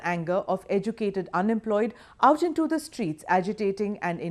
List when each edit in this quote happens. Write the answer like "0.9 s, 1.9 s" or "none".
3.2 s